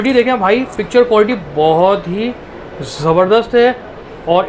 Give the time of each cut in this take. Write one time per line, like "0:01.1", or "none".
none

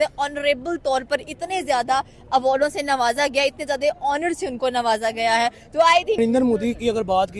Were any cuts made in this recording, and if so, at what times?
0:06.2

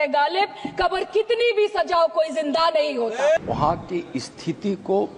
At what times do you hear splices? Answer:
0:03.4

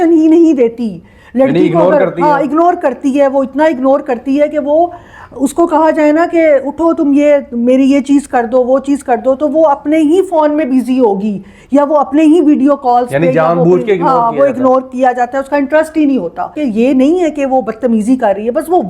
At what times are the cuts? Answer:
0:16.6

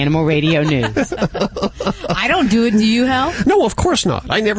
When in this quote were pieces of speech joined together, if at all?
none

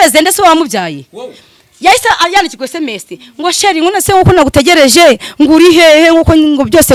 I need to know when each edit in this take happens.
none

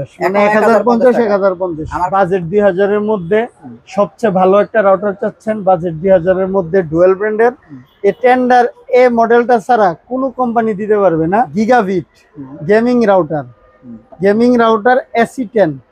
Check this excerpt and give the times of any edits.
0:02.0
0:11.5

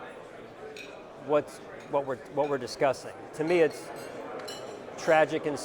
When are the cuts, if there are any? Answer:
0:03.2

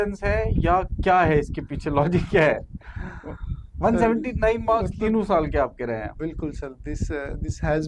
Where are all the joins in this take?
none

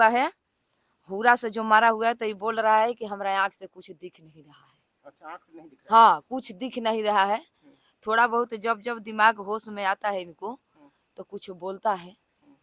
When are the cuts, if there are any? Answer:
none

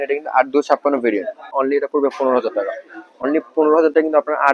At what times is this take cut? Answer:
0:01.5

